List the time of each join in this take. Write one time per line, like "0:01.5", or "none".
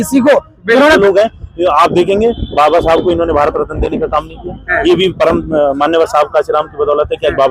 0:01.0